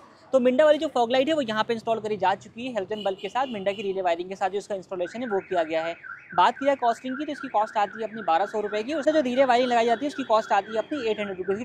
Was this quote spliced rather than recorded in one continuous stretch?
no; 0 cuts

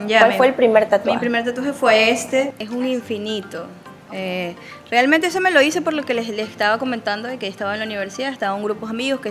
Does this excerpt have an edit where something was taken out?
no; 0 cuts

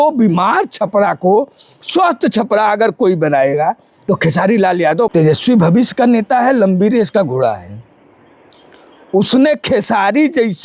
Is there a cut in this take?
yes; 1 cut; at 5.1 s

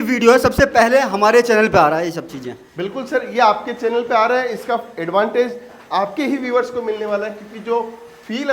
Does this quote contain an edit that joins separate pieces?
no; 0 cuts

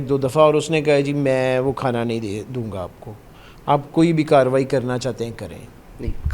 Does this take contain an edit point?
no; 0 cuts

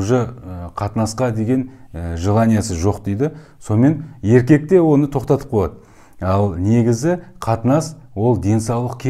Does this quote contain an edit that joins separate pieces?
no; 0 cuts

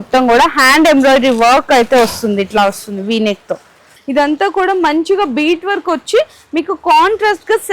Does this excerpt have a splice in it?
yes; 1 cut; at 3.9 s

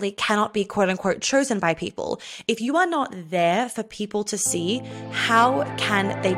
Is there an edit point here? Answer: no; 0 cuts

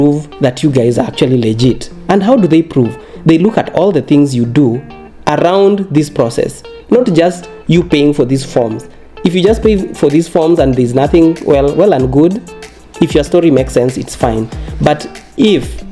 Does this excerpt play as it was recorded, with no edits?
yes; 0 cuts

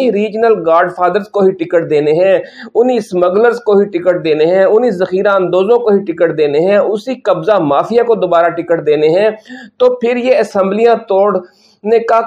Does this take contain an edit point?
no; 0 cuts

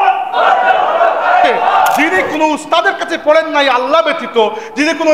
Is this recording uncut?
no; 1 cut; at 2.1 s

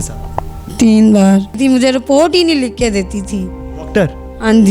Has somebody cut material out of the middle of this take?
yes; 1 cut; at 1.6 s

